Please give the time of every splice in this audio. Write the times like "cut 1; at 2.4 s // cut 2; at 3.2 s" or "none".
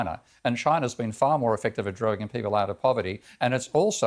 none